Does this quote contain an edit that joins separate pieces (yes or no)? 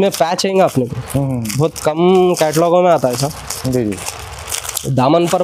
no